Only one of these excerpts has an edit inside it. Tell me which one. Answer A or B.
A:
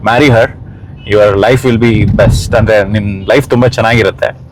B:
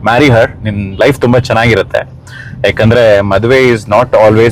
B